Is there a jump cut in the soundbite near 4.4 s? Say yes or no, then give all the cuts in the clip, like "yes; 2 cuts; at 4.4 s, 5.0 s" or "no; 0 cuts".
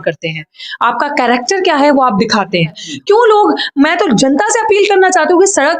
no; 1 cut; at 2.9 s